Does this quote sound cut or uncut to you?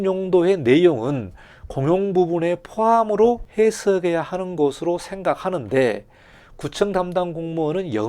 cut